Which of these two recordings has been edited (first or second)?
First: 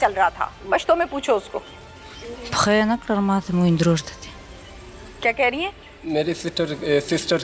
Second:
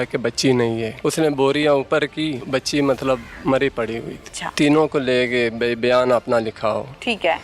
second